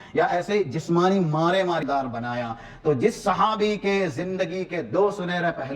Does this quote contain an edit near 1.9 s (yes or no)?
yes